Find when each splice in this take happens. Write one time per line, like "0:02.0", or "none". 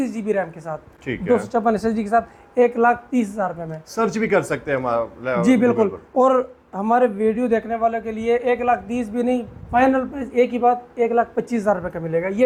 none